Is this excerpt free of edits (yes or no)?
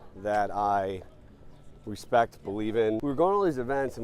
no